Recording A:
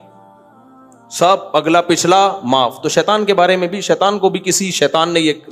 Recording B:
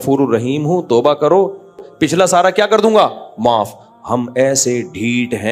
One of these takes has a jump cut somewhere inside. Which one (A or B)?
B